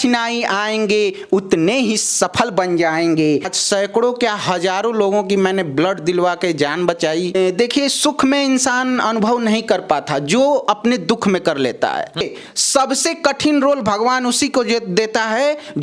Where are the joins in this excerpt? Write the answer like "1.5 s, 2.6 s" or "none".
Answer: 3.4 s, 7.4 s, 12.2 s